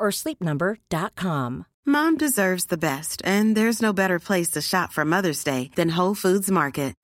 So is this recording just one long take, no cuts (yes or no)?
no